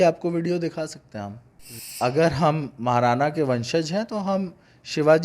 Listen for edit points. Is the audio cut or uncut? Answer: cut